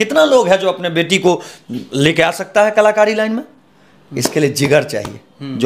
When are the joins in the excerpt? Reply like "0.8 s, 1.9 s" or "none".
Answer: none